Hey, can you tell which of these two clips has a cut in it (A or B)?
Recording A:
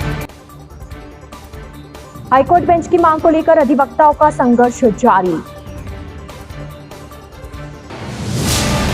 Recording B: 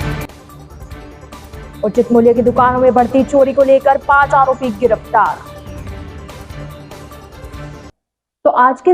A